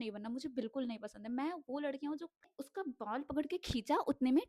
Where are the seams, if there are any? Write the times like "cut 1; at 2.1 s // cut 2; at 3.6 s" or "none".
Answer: cut 1; at 2.6 s